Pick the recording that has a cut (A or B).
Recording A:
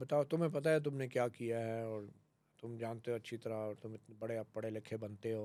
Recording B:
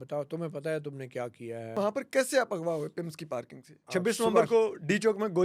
B